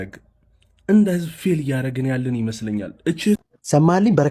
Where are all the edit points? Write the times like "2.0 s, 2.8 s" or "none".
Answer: 3.4 s